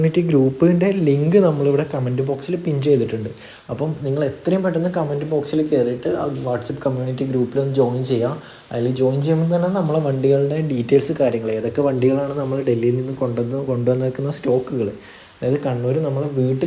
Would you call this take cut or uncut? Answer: uncut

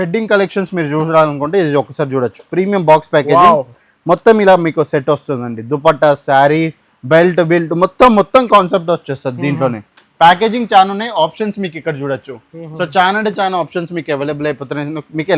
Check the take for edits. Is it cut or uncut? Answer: uncut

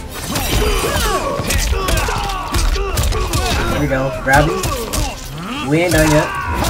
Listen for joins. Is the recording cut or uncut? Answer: uncut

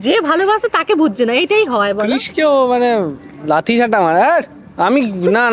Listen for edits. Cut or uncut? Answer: uncut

